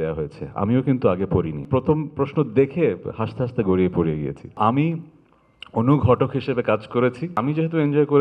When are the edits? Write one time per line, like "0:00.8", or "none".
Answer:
0:01.6
0:04.6
0:07.4

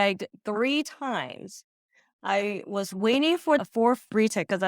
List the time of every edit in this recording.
0:03.6

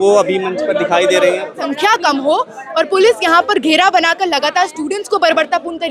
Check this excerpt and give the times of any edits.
0:01.6

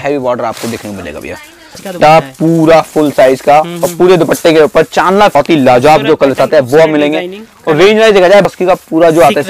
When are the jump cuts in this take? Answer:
0:01.9
0:05.3
0:08.5

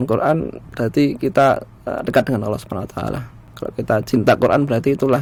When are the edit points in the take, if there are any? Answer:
none

